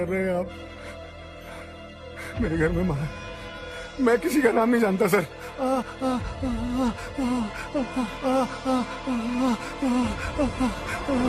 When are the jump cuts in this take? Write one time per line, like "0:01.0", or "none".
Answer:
none